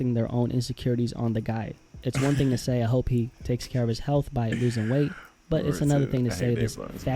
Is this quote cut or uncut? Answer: uncut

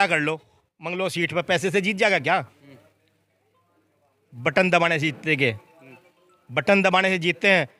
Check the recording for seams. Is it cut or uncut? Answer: uncut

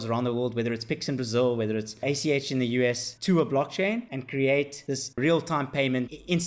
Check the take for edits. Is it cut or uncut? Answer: cut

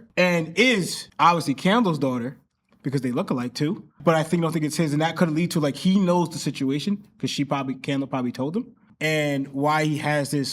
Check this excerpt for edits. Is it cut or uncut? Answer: uncut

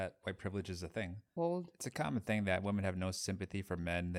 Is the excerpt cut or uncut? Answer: cut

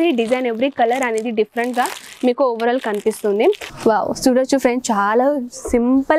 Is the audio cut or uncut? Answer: cut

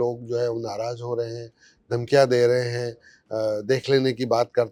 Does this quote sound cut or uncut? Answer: uncut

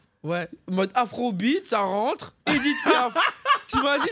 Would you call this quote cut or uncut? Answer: uncut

